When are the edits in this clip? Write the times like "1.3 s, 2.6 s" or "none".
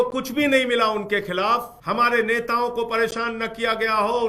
1.7 s

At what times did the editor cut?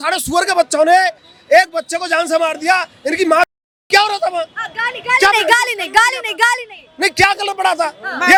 none

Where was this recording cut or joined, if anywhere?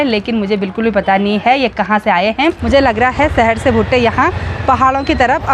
2.6 s

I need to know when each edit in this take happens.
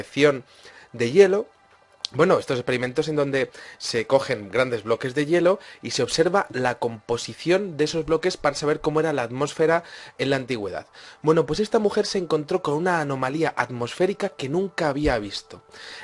6.5 s

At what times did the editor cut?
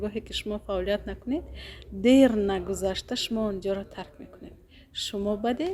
none

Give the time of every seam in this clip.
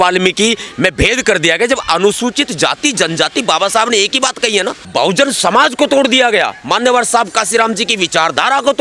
4.8 s

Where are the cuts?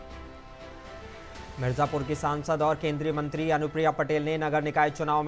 1.1 s

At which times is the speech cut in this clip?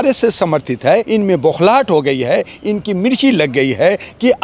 1.1 s

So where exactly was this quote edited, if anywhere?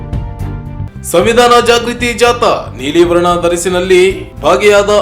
1.0 s

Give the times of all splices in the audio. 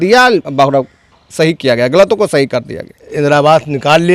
3.0 s

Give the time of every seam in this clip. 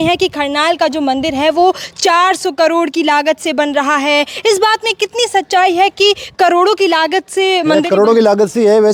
none

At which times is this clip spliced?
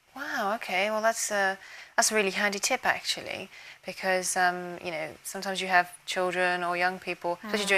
4.7 s

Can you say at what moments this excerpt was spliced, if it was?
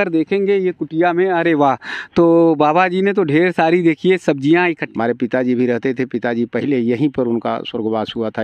4.8 s

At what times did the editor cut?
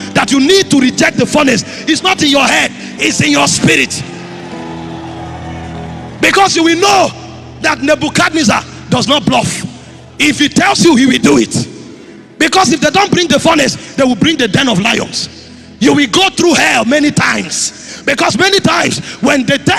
none

